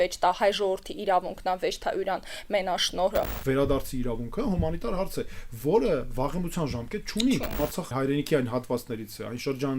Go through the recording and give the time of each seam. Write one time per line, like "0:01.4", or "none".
0:03.4
0:07.8